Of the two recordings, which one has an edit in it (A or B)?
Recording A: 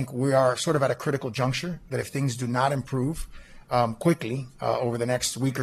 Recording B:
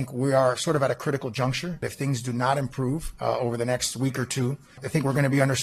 B